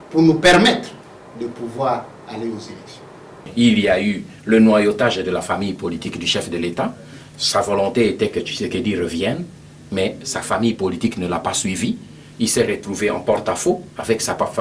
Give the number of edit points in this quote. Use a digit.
1